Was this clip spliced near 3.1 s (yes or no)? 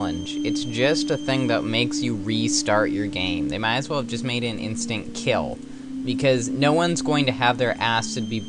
yes